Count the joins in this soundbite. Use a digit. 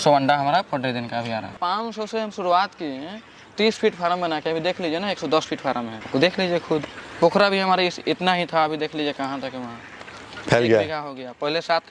1